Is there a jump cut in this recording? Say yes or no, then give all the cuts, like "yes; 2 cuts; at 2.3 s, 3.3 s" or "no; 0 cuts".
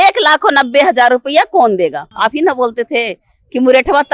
yes; 1 cut; at 2.1 s